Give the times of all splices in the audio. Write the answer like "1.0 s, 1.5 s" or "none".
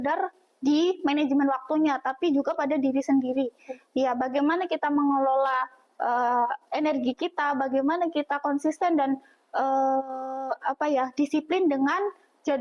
none